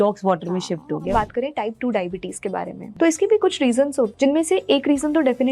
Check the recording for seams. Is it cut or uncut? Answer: cut